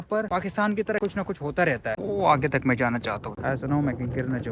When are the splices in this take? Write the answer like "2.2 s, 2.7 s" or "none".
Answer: 1.9 s, 3.3 s

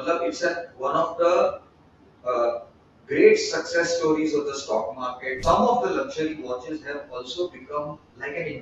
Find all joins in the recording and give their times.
5.4 s

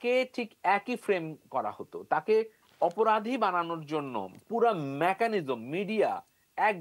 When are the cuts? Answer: none

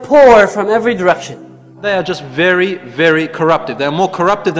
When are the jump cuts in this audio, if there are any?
1.8 s

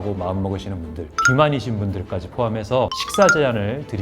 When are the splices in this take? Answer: 3.0 s

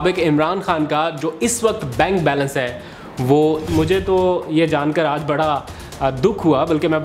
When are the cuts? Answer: 3.7 s

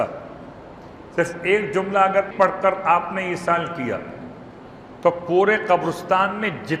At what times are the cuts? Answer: 2.3 s

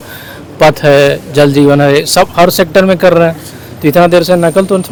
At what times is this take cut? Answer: none

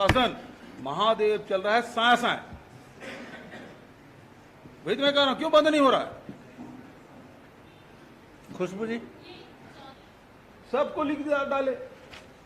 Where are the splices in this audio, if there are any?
9.9 s

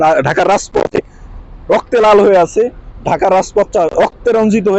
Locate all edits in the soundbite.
none

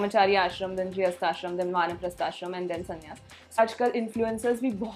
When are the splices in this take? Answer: 3.6 s

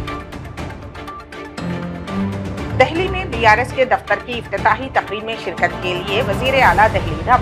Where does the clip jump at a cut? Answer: 2.5 s

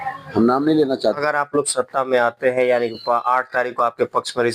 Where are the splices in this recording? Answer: 1.2 s

